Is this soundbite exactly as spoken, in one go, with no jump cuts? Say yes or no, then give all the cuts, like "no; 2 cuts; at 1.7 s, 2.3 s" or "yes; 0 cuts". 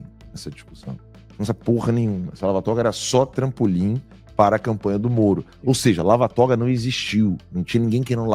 no; 1 cut; at 5.5 s